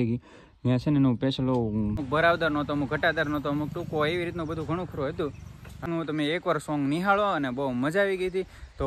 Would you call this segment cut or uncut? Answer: cut